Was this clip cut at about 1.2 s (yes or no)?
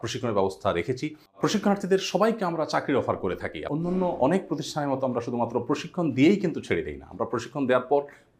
yes